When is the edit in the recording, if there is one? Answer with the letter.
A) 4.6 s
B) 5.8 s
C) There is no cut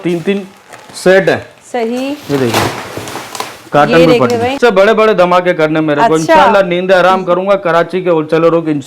A